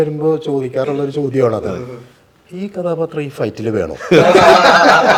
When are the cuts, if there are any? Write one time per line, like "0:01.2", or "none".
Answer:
none